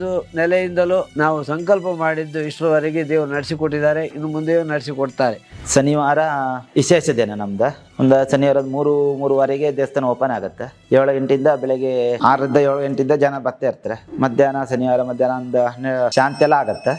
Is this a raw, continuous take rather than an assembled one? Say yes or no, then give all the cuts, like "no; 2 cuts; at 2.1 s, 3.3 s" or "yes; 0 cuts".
no; 1 cut; at 5.5 s